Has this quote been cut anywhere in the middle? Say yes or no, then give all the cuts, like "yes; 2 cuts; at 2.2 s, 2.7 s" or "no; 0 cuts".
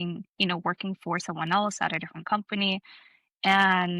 no; 0 cuts